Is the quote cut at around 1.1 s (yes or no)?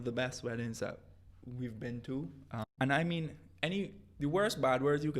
no